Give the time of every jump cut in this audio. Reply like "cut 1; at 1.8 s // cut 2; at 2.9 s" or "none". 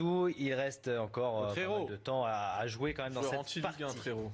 cut 1; at 1.0 s